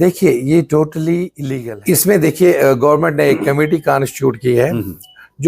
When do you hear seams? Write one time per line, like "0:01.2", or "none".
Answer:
0:01.4